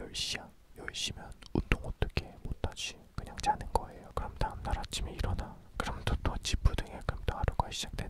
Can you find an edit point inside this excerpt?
no; 0 cuts

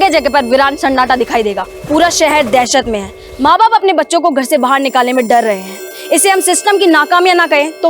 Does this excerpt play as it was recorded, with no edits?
no; 1 cut; at 1.7 s

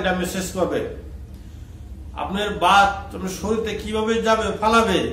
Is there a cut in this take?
no; 0 cuts

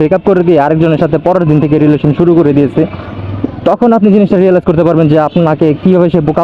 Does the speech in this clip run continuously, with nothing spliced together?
yes; 0 cuts

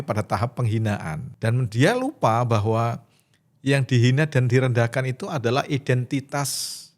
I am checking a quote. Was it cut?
yes; 1 cut; at 1.3 s

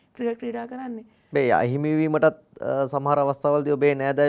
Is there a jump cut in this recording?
no; 0 cuts

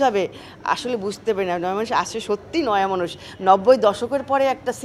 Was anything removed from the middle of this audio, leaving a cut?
no; 0 cuts

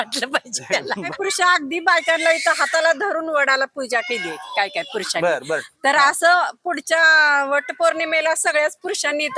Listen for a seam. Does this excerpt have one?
yes; 1 cut; at 1.1 s

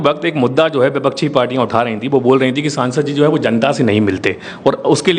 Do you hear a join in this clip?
no; 0 cuts

